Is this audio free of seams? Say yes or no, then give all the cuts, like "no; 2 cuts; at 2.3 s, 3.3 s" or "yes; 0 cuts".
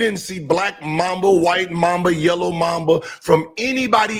yes; 0 cuts